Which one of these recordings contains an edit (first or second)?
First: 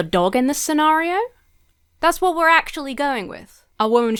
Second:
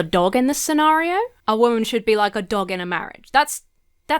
second